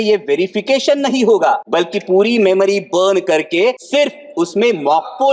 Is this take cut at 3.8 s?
yes; 2 cuts; at 1.6 s, 3.8 s

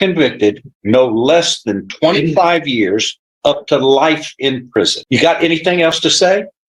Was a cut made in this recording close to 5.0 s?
yes; 1 cut; at 5.0 s

